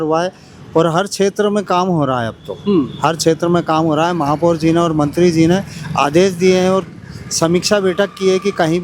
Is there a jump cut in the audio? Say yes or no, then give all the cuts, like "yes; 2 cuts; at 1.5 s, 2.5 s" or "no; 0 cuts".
no; 0 cuts